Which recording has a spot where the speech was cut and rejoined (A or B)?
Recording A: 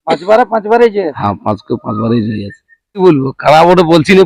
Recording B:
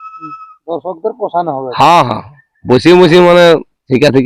A